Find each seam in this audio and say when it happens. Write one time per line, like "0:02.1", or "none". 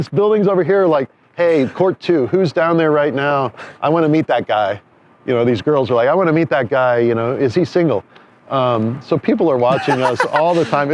none